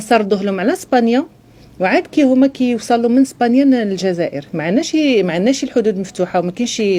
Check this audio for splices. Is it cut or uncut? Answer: uncut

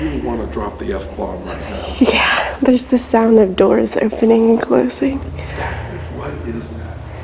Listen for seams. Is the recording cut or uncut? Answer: uncut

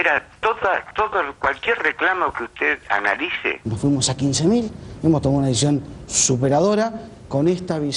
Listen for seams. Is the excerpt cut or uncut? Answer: cut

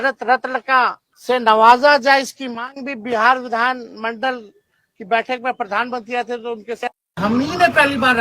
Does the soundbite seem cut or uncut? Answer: cut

